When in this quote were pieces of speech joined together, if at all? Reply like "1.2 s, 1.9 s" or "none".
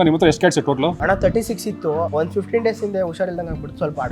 1.0 s, 2.1 s